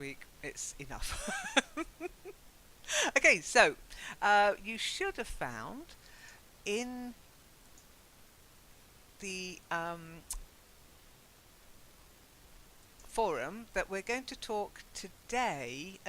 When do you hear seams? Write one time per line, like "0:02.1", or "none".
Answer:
0:09.8